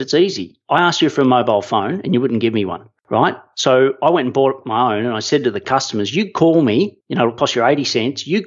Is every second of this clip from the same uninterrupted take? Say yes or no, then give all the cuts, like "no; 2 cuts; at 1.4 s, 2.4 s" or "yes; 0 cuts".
yes; 0 cuts